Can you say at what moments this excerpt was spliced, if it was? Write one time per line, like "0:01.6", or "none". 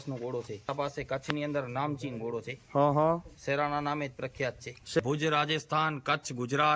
0:00.7
0:05.0